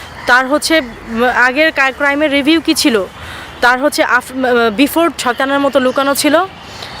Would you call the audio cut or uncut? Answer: cut